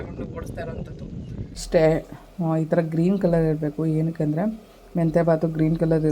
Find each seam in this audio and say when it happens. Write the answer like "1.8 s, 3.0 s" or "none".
1.6 s